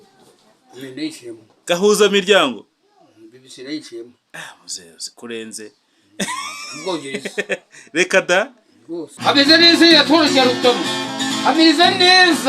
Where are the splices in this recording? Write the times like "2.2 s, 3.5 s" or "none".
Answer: 9.2 s